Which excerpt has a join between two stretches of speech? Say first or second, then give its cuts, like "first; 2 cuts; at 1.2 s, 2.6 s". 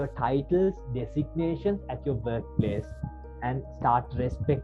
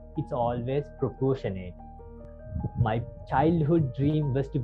second; 1 cut; at 2.2 s